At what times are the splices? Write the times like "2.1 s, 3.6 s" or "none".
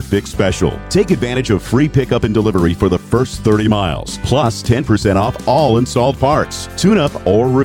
none